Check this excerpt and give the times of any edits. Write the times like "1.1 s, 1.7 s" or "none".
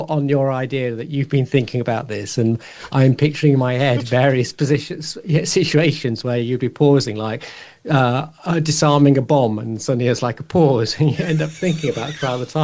none